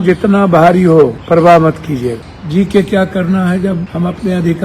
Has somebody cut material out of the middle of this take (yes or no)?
yes